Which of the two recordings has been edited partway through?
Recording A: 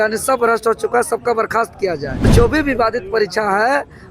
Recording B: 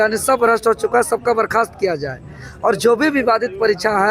A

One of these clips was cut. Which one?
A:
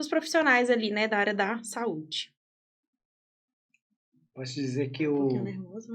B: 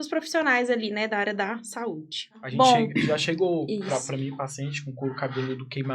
B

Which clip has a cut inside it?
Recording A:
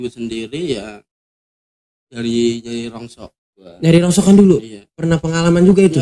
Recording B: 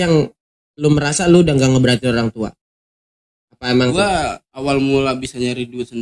B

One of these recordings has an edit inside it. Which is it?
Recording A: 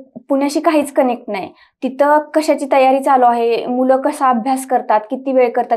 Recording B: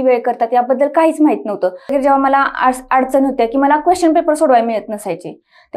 B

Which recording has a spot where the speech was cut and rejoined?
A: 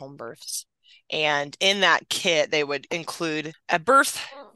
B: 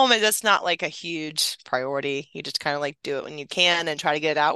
A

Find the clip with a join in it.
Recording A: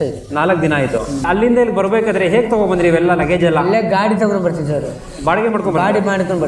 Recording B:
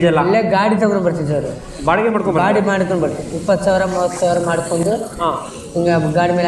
A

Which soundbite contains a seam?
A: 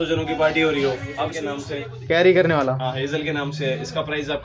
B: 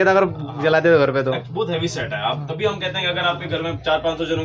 A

